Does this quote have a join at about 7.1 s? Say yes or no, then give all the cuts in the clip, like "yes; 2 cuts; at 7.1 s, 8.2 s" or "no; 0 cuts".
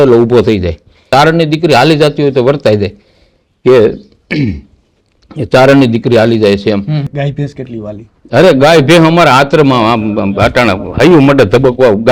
yes; 2 cuts; at 1.1 s, 7.1 s